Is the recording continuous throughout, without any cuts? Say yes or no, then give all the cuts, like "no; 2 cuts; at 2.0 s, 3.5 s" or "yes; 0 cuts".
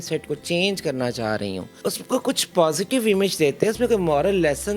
no; 1 cut; at 1.8 s